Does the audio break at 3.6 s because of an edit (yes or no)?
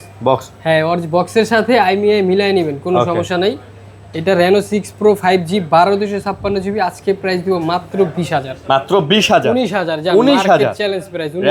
no